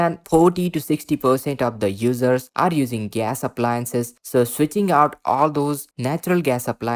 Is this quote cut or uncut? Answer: uncut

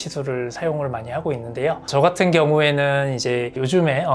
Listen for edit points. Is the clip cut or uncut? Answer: uncut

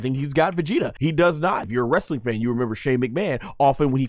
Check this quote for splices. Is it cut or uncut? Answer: cut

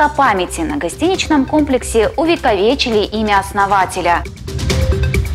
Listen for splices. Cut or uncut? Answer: uncut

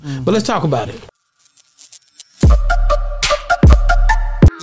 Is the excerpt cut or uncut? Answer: cut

